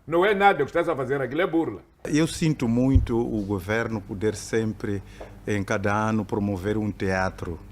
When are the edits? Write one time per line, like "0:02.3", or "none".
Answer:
0:02.1